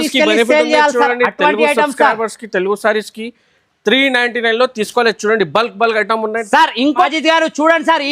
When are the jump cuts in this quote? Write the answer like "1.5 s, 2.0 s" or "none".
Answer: 7.1 s